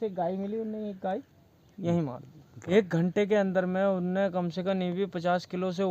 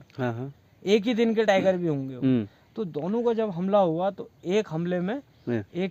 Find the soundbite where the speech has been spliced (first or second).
first